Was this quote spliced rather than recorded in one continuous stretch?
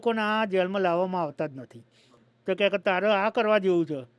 yes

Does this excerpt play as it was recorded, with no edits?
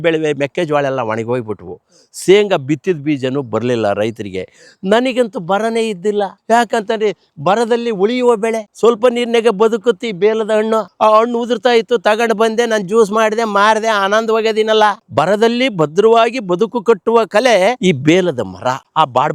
no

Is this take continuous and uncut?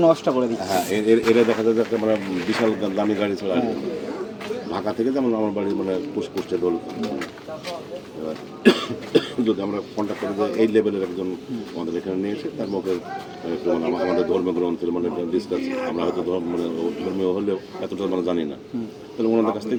yes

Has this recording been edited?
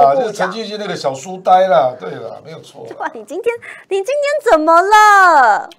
no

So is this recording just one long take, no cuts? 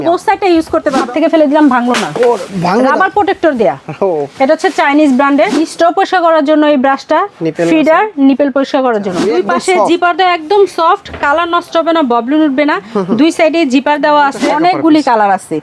no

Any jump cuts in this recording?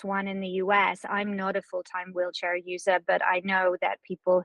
no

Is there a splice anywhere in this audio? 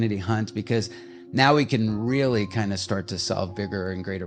no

